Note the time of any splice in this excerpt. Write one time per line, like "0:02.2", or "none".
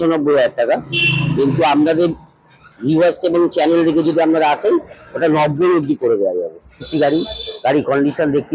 0:06.8